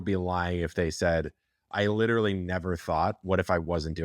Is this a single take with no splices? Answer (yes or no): yes